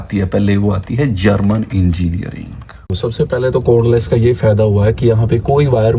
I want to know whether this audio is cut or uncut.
cut